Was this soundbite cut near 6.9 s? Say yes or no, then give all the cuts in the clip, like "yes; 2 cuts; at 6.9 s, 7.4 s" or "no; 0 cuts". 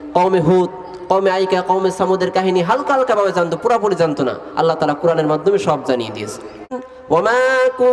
yes; 1 cut; at 6.9 s